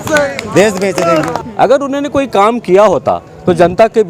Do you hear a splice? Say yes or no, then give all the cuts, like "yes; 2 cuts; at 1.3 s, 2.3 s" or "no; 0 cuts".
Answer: yes; 1 cut; at 1.4 s